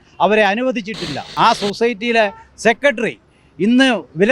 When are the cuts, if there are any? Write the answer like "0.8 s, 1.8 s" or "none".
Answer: 1.2 s

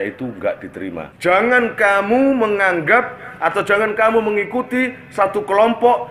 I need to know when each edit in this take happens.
1.0 s

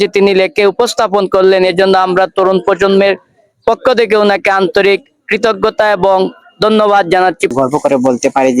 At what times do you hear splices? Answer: 7.5 s

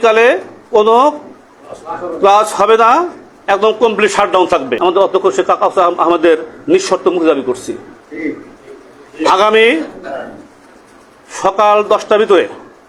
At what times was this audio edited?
4.8 s

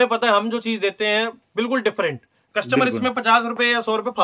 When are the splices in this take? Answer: none

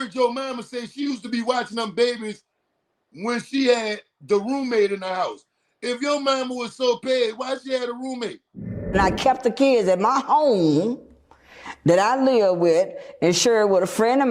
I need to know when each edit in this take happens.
none

